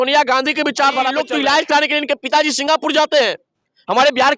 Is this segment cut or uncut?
cut